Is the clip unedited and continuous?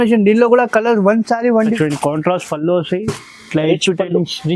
no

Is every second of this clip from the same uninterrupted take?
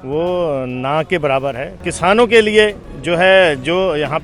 no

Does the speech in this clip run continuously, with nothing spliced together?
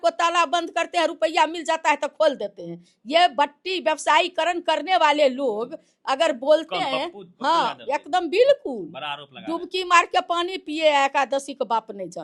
yes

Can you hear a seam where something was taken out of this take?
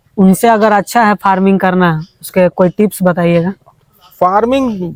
no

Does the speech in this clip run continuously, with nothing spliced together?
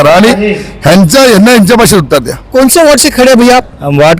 no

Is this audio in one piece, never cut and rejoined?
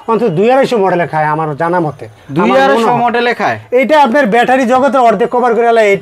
yes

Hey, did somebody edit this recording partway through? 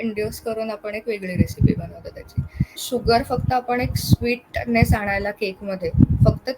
yes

